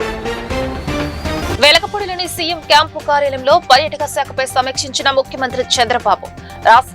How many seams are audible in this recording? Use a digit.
1